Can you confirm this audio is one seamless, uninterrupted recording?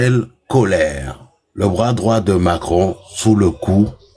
yes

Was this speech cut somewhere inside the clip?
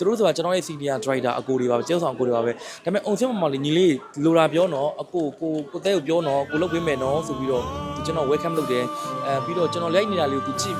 no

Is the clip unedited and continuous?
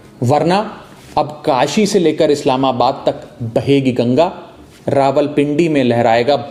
yes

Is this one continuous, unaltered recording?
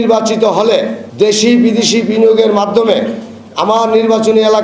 no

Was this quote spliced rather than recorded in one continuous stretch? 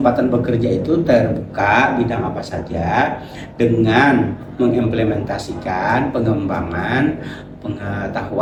no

